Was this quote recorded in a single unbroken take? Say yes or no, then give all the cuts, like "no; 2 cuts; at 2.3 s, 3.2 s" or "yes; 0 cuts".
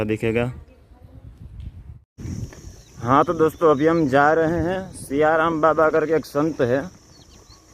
no; 1 cut; at 2.1 s